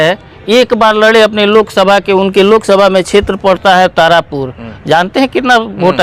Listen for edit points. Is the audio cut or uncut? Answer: uncut